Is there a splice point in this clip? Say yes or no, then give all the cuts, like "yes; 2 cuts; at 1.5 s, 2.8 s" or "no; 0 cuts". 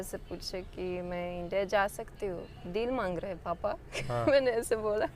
yes; 1 cut; at 2.5 s